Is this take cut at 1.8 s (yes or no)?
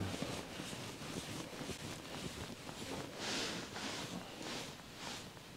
no